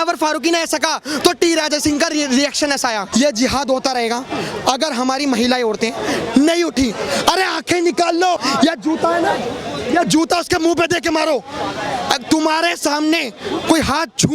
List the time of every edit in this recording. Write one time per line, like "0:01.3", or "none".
0:03.1
0:08.4